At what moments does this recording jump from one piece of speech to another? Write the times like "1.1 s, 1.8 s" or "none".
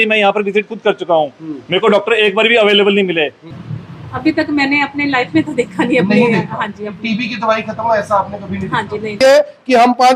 3.4 s, 9.1 s